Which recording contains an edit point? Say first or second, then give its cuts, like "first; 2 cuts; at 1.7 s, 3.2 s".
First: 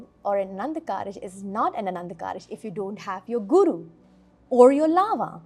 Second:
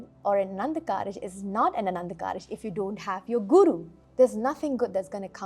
second; 1 cut; at 4.0 s